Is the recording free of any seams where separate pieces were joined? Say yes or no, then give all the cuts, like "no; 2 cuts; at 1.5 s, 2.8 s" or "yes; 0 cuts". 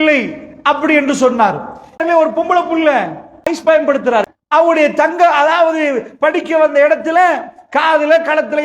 no; 3 cuts; at 2.0 s, 3.5 s, 4.4 s